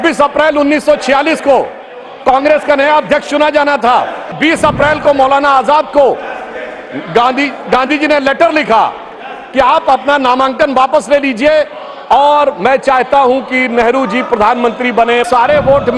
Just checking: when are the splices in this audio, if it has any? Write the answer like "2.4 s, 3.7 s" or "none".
4.3 s, 15.3 s

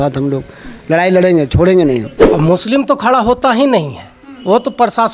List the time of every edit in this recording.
2.2 s

